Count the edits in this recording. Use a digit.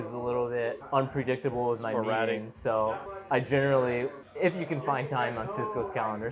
3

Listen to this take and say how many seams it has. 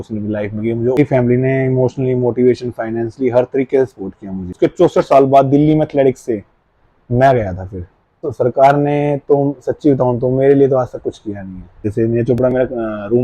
4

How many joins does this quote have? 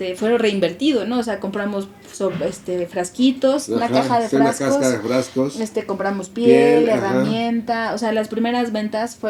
0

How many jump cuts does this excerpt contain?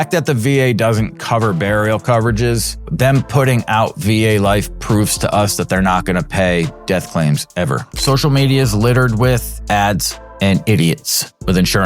1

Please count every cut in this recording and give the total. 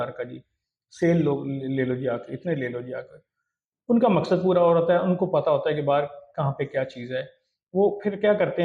0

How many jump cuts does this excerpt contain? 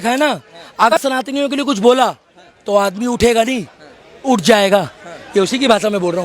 1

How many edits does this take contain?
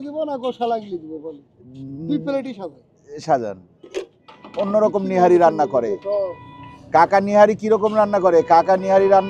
1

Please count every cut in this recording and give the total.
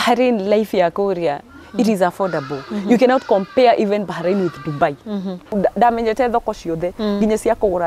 1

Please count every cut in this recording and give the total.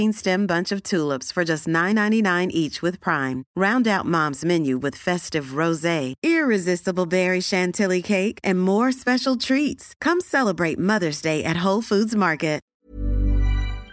1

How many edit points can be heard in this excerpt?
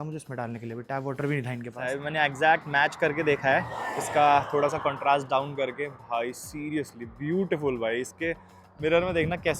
1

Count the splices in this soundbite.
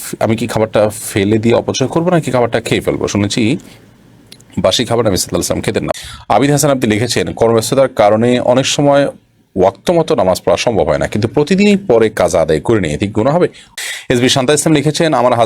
2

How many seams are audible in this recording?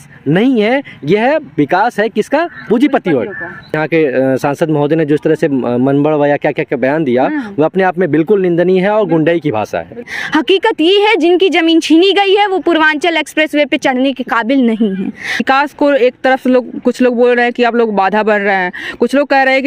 3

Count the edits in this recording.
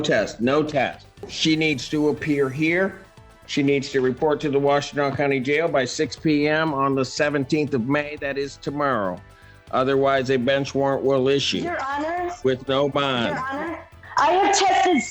2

